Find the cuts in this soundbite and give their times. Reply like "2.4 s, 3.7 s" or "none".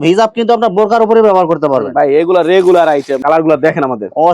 3.2 s